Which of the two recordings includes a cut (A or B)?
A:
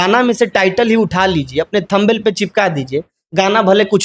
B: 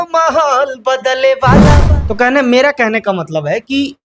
B